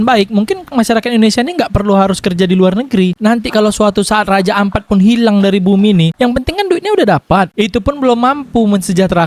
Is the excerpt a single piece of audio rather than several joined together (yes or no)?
no